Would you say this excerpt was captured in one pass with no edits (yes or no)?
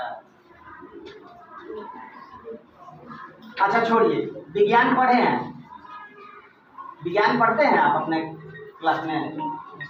yes